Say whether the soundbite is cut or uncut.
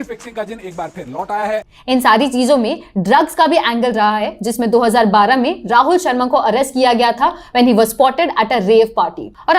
cut